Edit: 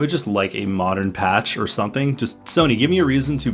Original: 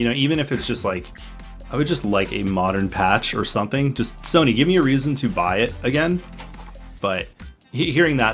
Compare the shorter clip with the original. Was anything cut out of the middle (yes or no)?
no